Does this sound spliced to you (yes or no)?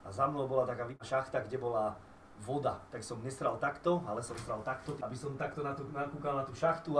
yes